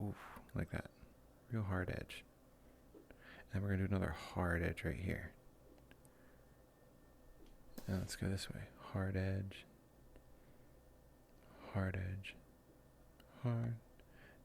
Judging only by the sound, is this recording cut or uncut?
uncut